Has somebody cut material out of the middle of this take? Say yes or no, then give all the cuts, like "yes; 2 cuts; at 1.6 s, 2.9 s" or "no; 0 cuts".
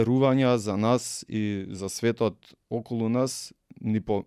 no; 0 cuts